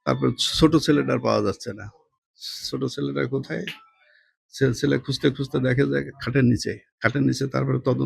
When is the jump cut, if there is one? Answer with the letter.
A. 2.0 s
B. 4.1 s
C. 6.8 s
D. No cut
C